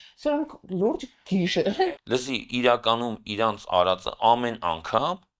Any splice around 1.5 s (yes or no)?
yes